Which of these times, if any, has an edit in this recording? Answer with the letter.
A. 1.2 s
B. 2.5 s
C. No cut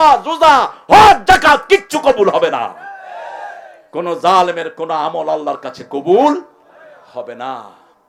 C